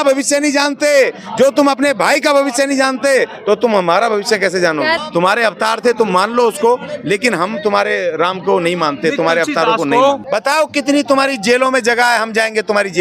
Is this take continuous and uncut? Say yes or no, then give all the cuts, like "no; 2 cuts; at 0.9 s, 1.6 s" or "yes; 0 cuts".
no; 2 cuts; at 5.0 s, 10.2 s